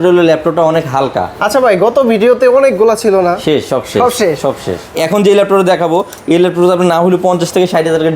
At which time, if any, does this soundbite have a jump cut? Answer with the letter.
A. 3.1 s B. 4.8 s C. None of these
B